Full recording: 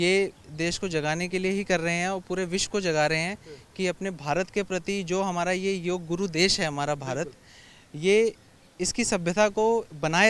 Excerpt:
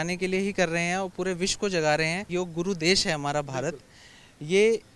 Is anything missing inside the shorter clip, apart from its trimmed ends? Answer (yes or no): yes